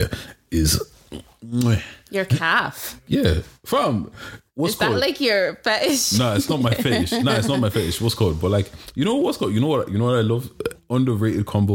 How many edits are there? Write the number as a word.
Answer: zero